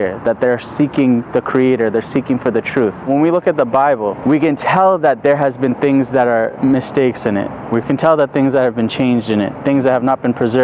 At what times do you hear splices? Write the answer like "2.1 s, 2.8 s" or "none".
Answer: 3.1 s, 4.2 s, 6.5 s